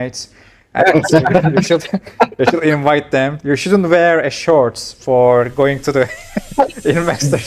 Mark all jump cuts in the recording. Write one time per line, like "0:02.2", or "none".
none